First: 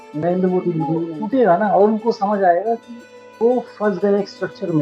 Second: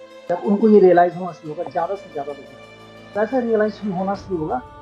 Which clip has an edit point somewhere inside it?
first; 1 cut; at 1.1 s

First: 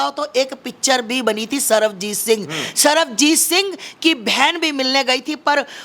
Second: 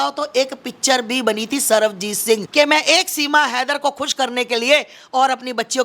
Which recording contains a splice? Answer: second; 1 cut; at 2.5 s

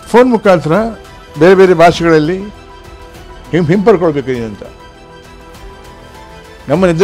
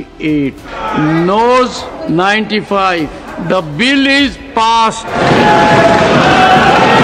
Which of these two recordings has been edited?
second; 4 cuts; at 0.8 s, 1.9 s, 3.3 s, 5.2 s

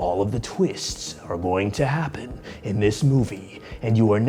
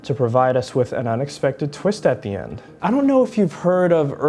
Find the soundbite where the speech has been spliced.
second; 1 cut; at 2.7 s

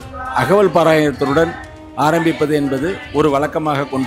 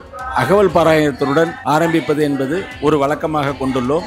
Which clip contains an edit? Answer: second; 1 cut; at 1.6 s

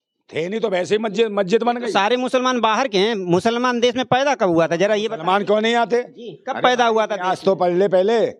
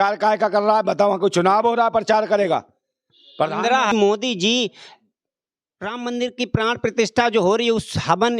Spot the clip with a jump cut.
second; 1 cut; at 3.9 s

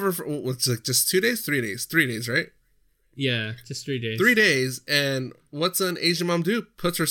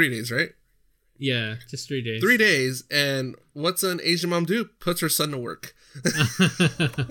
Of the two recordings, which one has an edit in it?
second; 1 cut; at 6.2 s

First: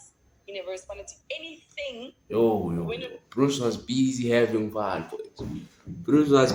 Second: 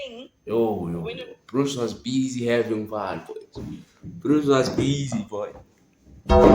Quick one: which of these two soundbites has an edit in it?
second; 1 cut; at 5.6 s

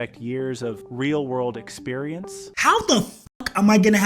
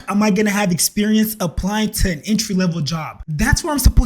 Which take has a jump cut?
first; 1 cut; at 2.5 s

